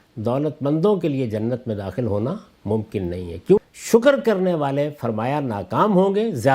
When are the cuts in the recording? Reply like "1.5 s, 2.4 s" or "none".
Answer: 3.6 s